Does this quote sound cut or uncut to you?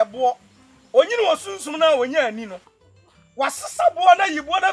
uncut